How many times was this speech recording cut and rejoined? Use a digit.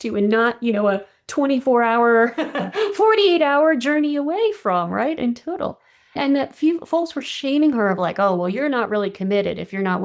1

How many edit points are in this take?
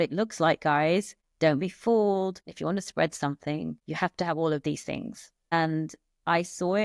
4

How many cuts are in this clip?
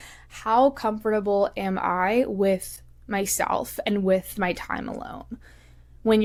0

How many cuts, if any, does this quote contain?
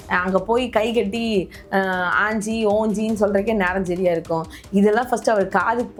0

